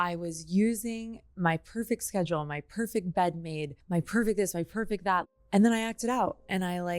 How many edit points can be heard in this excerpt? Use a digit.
2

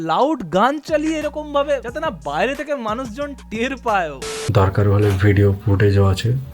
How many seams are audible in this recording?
2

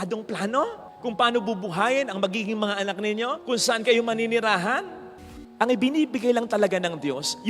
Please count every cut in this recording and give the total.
1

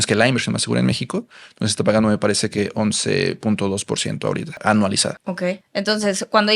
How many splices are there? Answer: 0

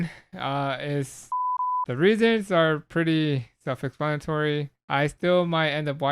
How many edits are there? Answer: 2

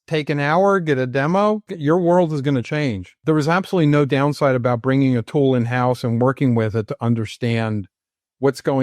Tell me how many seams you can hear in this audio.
2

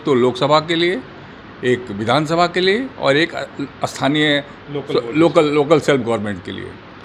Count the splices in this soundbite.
0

